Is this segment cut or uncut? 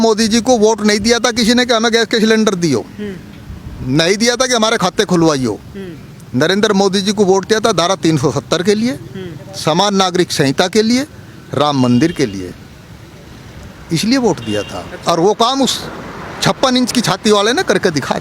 uncut